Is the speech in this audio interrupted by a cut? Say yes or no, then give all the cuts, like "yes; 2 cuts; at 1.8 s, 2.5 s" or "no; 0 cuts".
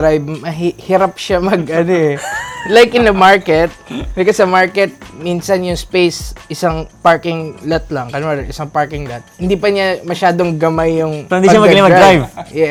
no; 0 cuts